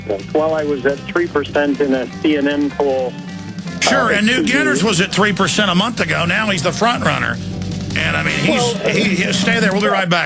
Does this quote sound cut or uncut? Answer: uncut